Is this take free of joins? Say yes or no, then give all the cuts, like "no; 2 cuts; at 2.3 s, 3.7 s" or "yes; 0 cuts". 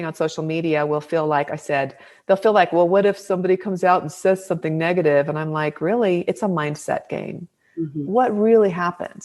yes; 0 cuts